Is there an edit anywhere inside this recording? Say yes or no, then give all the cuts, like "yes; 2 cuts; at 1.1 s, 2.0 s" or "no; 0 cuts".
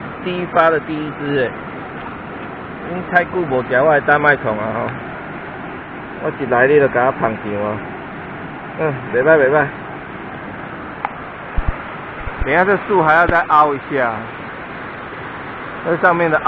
no; 0 cuts